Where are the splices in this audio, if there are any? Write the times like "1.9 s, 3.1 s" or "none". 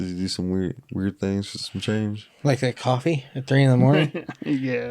2.3 s